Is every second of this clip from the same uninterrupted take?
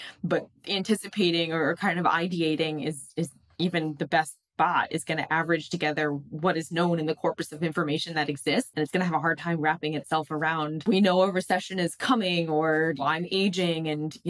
no; 3 cuts; at 8.7 s, 10.8 s, 13.0 s

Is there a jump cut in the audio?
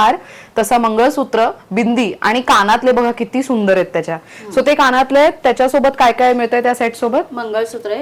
no; 0 cuts

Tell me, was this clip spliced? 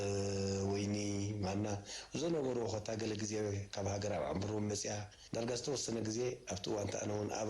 yes; 1 cut; at 5.1 s

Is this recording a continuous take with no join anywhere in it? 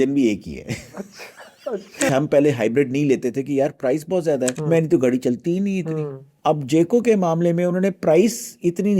no; 3 cuts; at 2.1 s, 4.6 s, 6.2 s

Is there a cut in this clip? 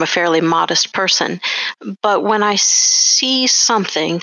no; 0 cuts

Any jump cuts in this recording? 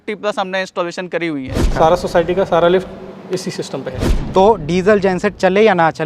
yes; 2 cuts; at 1.7 s, 4.0 s

